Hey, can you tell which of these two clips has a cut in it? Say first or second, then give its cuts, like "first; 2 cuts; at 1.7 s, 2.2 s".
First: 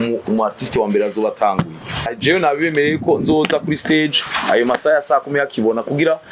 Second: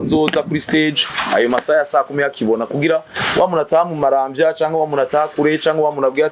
first; 1 cut; at 2.1 s